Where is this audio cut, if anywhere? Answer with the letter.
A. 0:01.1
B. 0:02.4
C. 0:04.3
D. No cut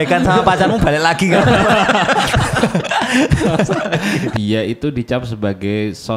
C